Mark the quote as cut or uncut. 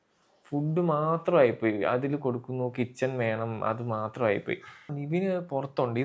cut